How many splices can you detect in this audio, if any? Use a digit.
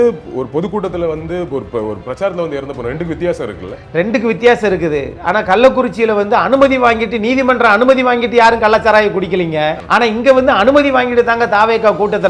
1